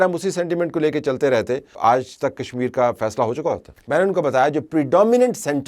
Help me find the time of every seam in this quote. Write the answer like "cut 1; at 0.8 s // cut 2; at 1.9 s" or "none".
cut 1; at 1.7 s // cut 2; at 3.7 s